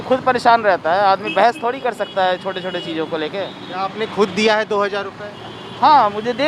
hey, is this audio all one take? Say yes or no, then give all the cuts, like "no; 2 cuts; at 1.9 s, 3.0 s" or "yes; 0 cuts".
yes; 0 cuts